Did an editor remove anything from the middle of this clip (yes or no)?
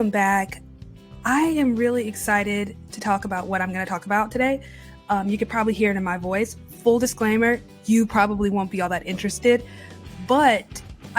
no